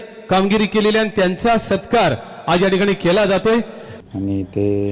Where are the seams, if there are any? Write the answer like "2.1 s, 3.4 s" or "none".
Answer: 3.8 s